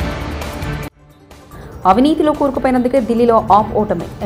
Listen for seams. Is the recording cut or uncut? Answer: uncut